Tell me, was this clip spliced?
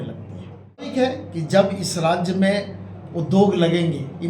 yes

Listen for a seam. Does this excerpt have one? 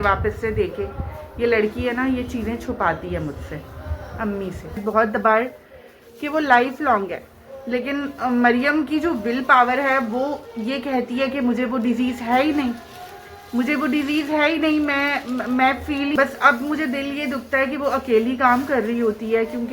yes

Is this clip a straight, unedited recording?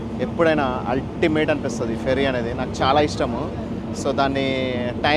yes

